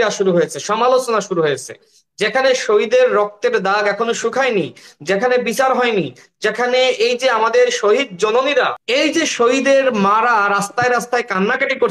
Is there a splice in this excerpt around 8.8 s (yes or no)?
yes